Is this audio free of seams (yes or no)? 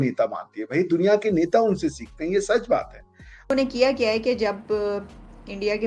no